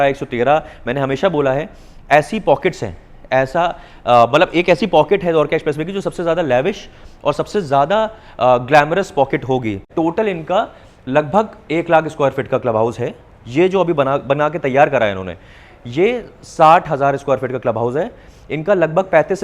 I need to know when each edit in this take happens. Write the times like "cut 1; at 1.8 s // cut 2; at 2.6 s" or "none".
cut 1; at 9.9 s